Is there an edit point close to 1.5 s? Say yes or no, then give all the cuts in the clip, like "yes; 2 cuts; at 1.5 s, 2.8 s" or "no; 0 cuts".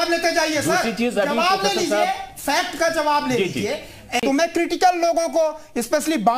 no; 1 cut; at 4.2 s